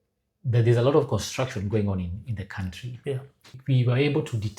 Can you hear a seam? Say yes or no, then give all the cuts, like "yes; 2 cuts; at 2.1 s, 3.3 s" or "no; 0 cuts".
yes; 1 cut; at 3.6 s